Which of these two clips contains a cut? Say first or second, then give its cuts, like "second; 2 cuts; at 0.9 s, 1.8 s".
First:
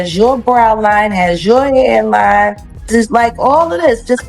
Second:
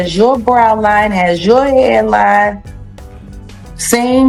first; 1 cut; at 2.9 s